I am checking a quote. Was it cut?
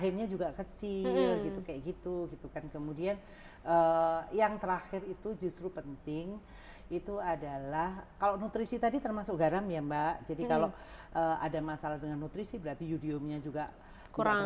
no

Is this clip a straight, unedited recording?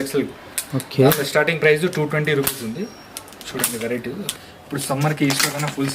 no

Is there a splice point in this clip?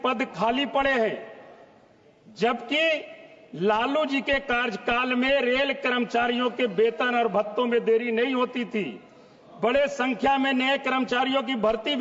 no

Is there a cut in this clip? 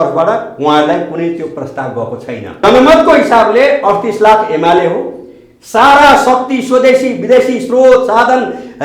yes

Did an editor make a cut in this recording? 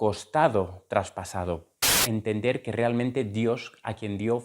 yes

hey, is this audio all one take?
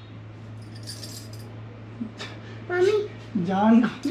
yes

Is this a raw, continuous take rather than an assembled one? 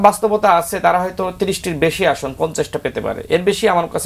yes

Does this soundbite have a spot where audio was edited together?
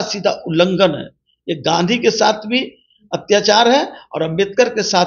no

